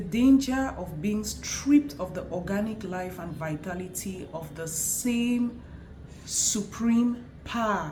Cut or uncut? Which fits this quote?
uncut